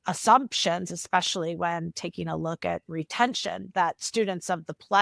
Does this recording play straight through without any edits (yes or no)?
no